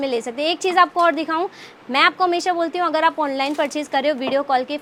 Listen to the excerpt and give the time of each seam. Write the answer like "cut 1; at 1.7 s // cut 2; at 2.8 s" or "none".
none